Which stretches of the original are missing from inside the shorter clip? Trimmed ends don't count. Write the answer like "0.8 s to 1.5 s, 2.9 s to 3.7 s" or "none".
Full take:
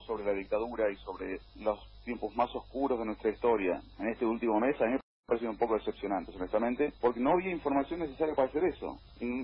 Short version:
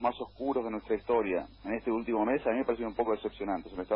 5.0 s to 5.3 s